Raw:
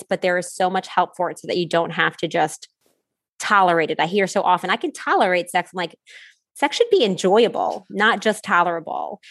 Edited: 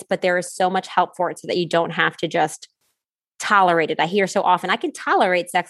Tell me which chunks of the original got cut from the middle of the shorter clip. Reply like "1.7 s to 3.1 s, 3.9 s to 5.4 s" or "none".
none